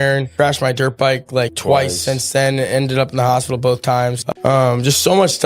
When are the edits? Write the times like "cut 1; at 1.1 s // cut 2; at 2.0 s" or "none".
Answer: cut 1; at 4.3 s